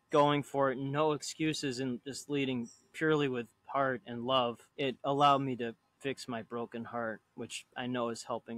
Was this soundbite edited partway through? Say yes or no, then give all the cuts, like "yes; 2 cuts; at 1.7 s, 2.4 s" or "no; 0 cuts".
yes; 2 cuts; at 4.6 s, 5.9 s